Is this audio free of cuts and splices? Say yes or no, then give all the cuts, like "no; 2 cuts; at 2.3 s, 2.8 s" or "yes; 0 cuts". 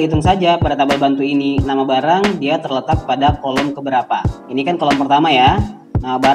no; 1 cut; at 4.4 s